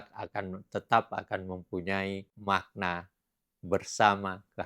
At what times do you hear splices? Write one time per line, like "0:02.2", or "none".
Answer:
0:02.3